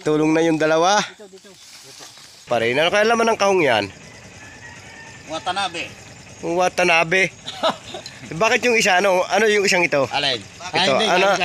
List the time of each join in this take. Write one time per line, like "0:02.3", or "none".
0:02.5